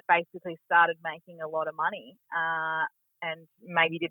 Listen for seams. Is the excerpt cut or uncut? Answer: uncut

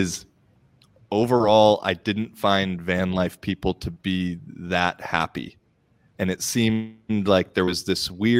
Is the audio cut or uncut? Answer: uncut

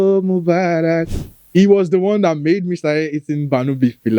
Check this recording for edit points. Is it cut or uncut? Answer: cut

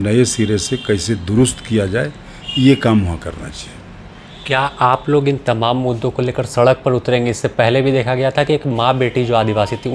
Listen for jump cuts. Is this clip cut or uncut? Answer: uncut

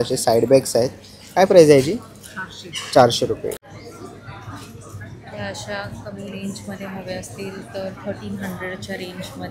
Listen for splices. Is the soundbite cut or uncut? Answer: cut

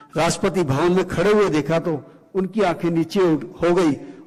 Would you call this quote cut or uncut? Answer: uncut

